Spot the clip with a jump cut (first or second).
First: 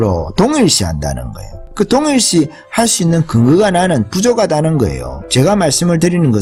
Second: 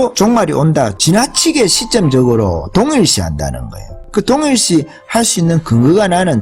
second